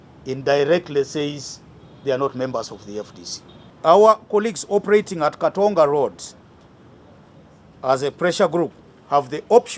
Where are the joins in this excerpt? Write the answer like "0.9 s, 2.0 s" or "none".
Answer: 3.6 s